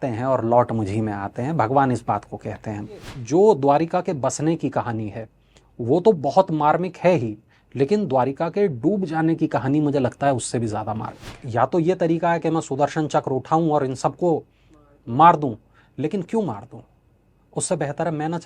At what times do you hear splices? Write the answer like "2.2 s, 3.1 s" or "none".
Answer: 3.1 s, 11.3 s